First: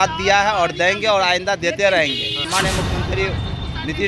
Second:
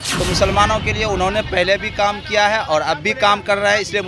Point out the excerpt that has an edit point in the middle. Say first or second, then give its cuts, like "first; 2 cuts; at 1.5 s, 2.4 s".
first; 1 cut; at 2.5 s